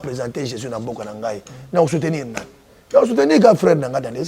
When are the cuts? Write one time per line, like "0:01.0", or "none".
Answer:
none

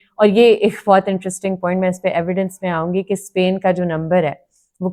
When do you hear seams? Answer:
none

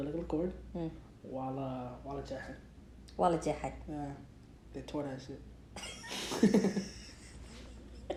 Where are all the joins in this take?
none

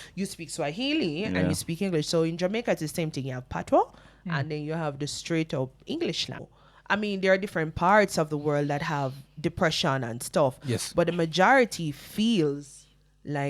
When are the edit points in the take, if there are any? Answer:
0:06.5

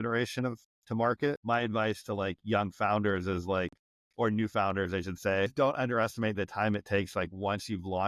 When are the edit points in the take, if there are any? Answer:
0:01.1
0:05.5

